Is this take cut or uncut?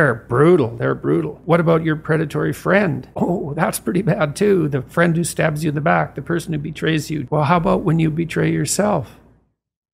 cut